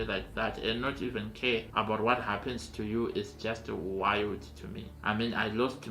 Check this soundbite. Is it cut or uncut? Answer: cut